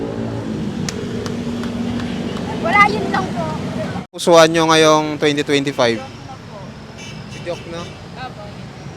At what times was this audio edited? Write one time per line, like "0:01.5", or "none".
0:04.2